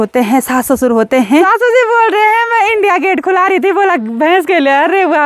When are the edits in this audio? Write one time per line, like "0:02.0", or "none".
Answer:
0:01.5